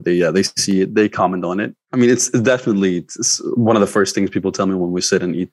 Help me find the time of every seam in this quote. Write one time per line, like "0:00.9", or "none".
0:01.8

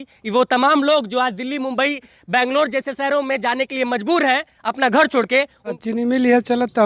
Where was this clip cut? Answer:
0:05.6

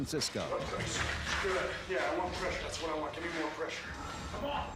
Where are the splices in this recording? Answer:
0:03.6

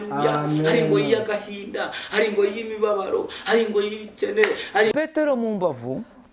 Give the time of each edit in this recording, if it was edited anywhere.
0:04.9

